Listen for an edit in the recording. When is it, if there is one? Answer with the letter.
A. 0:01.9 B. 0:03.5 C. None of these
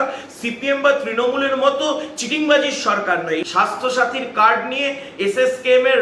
B